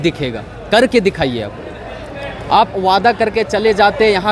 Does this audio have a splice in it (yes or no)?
no